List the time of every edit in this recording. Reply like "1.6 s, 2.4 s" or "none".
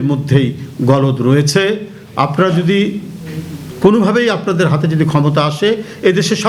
none